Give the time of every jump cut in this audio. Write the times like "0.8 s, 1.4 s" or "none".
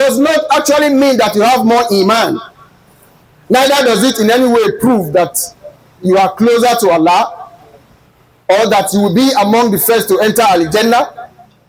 none